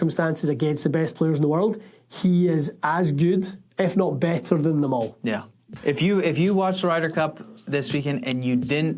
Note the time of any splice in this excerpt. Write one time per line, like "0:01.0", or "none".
0:05.7